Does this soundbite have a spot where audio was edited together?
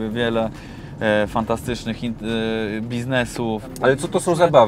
yes; 1 cut; at 3.7 s

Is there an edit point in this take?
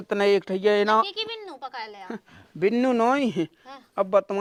no; 0 cuts

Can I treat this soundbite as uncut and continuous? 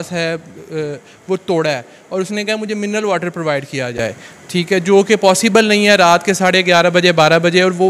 yes; 0 cuts

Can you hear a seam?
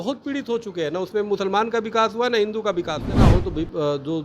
yes; 1 cut; at 3.2 s

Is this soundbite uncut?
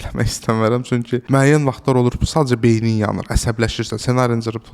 no; 1 cut; at 1.2 s

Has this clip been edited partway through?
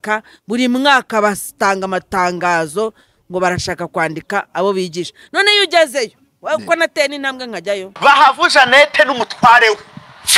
yes; 1 cut; at 7.9 s

